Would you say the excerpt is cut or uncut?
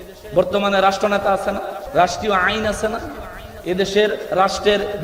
cut